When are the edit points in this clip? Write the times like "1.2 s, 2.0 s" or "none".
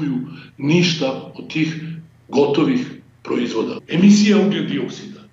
3.8 s